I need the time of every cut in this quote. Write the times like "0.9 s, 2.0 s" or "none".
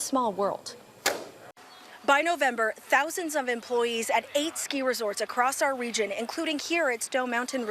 1.5 s

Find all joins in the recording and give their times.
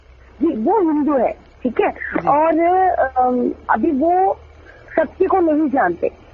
none

